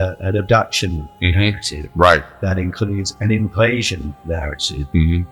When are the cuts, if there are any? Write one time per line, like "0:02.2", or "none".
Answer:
none